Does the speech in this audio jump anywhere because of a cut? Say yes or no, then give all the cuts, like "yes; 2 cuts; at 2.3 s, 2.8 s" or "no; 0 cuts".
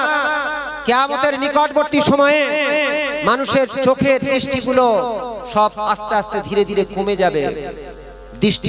no; 0 cuts